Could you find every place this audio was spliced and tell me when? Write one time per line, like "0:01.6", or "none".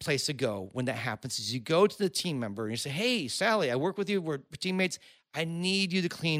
none